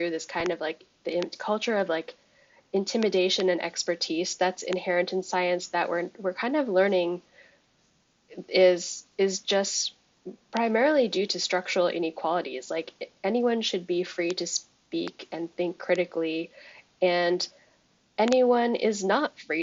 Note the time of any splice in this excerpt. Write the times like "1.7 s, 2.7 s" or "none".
none